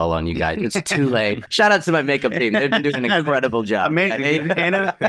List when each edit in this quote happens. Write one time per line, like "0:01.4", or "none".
0:01.4